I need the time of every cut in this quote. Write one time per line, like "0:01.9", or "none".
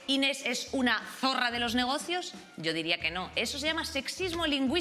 none